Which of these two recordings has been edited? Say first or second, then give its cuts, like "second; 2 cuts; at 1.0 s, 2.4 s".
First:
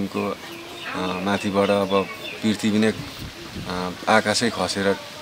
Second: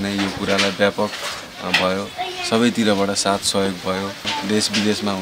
second; 1 cut; at 4.3 s